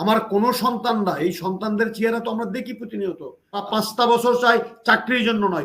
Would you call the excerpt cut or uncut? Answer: cut